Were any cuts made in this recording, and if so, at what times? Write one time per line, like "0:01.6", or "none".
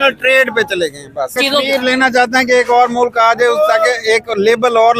0:01.3